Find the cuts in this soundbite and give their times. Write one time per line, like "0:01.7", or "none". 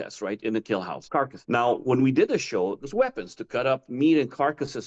0:01.0
0:02.8